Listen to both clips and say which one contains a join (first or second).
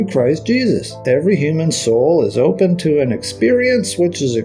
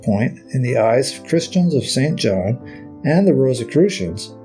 first